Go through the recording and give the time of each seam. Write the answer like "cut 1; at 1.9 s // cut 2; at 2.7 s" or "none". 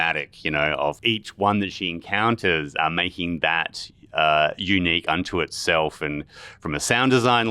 cut 1; at 1.0 s